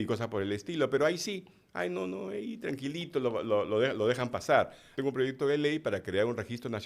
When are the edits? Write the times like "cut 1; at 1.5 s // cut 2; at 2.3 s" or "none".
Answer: cut 1; at 4.9 s